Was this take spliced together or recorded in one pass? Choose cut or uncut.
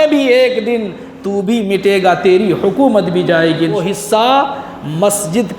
cut